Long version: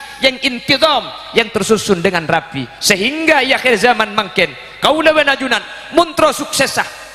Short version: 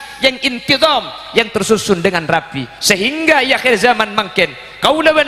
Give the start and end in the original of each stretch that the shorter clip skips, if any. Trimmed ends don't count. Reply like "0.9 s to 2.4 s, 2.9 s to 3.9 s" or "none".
none